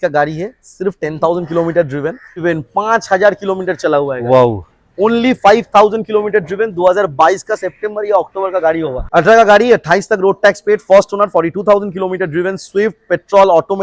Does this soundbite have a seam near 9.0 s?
yes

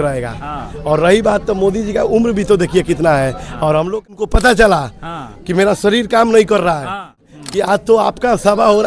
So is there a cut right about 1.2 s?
no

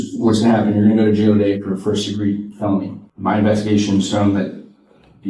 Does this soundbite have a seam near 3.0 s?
yes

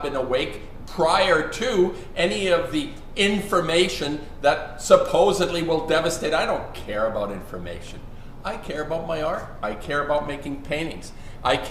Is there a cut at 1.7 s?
no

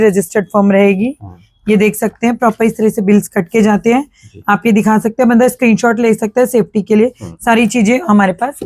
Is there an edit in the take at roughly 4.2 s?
no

